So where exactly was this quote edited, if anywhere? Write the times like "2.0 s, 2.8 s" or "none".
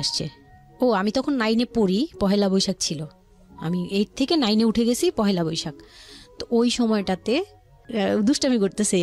7.8 s